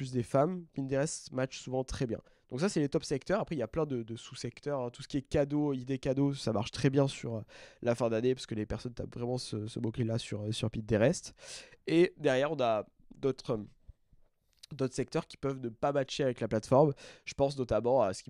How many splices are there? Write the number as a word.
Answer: zero